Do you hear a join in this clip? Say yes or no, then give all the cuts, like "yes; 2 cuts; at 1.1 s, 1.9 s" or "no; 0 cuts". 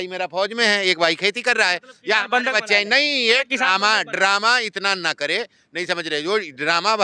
no; 0 cuts